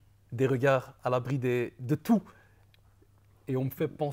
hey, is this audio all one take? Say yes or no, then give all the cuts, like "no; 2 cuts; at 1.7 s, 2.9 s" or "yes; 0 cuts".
yes; 0 cuts